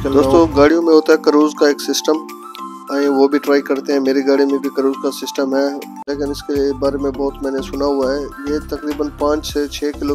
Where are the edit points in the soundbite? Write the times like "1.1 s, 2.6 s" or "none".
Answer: 6.0 s